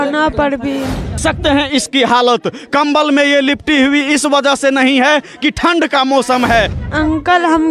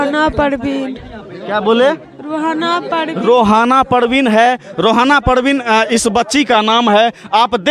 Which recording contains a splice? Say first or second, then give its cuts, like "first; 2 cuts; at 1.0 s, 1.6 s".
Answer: first; 2 cuts; at 1.2 s, 6.8 s